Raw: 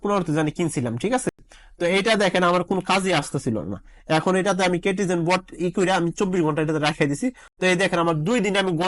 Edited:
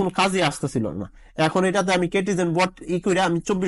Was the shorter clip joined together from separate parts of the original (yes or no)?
no